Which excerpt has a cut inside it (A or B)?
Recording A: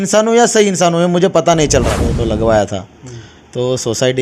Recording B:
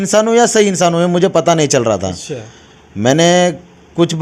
A